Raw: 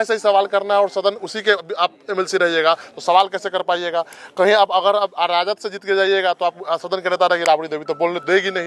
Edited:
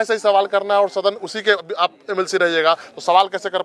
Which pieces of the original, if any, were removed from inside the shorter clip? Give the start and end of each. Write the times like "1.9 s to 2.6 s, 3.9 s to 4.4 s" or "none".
none